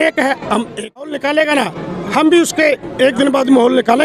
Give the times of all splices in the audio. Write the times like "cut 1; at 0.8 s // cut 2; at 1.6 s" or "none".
cut 1; at 1.1 s